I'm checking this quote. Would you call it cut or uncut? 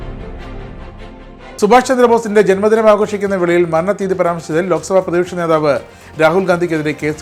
uncut